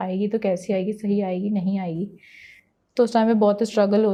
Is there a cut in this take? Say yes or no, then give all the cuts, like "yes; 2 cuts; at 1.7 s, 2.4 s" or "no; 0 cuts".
no; 0 cuts